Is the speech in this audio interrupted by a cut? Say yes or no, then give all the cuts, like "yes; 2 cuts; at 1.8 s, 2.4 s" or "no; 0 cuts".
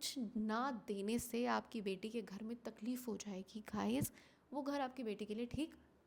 no; 0 cuts